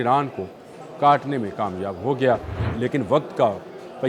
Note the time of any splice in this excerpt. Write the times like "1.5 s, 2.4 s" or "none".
2.6 s